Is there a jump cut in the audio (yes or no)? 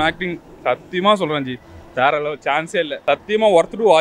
yes